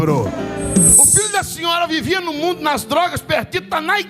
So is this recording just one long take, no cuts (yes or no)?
no